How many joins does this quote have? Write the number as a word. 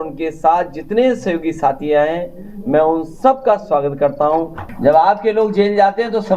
one